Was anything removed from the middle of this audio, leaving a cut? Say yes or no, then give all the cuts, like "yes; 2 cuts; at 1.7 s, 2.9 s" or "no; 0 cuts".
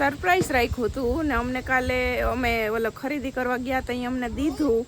no; 0 cuts